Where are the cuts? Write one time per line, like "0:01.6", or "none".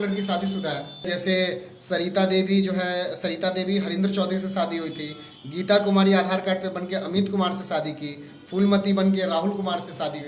0:01.1